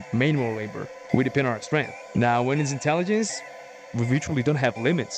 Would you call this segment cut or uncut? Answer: cut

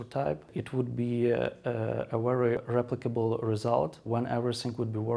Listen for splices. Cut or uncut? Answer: uncut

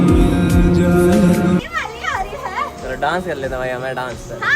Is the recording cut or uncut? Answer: cut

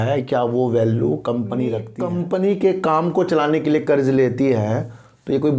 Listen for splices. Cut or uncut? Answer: cut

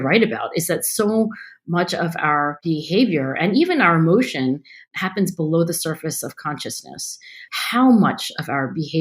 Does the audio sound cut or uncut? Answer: cut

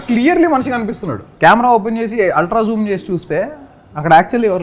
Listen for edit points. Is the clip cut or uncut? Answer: cut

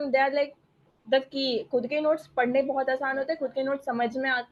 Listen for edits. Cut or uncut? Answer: uncut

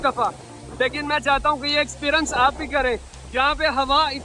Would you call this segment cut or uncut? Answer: cut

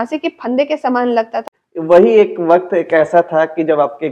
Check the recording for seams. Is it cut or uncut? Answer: cut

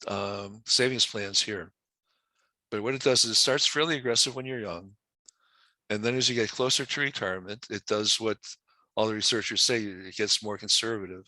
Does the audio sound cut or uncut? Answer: cut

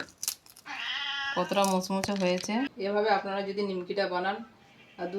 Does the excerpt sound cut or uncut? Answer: cut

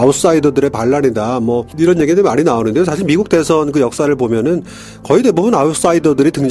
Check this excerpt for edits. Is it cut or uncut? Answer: uncut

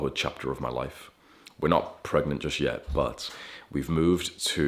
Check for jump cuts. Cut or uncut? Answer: uncut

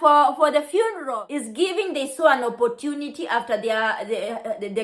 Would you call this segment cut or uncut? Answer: cut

